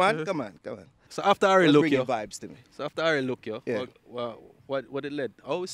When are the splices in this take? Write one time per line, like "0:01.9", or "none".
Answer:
0:01.1